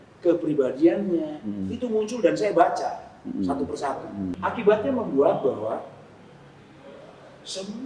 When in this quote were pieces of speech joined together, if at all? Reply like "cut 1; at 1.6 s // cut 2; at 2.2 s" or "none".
cut 1; at 4.3 s